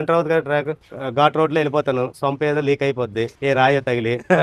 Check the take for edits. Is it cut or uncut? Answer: cut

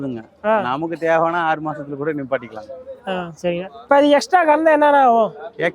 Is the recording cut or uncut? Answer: uncut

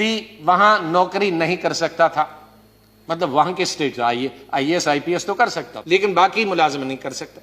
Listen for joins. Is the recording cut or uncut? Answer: cut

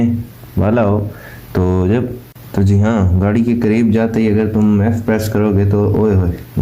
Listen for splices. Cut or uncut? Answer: cut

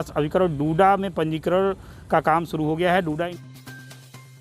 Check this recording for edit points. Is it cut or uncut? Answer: cut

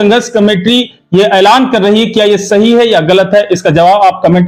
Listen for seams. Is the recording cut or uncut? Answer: uncut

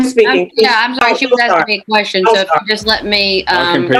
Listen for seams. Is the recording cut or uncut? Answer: uncut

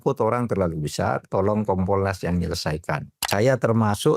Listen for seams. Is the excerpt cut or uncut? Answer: cut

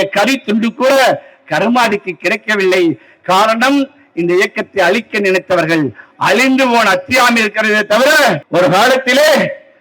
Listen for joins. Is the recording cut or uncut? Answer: cut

